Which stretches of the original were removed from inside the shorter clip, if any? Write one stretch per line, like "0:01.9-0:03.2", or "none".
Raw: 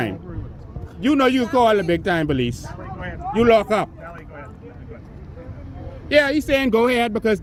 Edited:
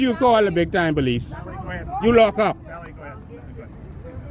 none